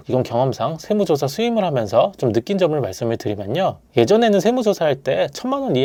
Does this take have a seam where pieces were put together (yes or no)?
no